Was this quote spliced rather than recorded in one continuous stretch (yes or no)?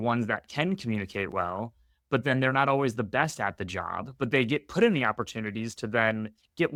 no